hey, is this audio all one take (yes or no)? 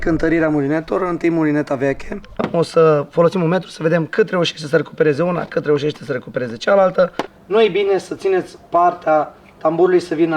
no